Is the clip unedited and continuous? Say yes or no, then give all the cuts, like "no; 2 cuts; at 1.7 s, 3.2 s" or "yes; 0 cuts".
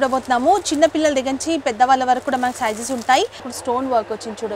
no; 1 cut; at 3.5 s